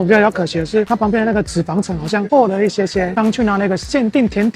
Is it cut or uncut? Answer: cut